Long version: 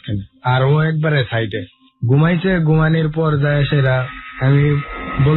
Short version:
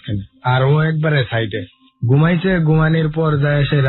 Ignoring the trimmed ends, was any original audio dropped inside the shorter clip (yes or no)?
no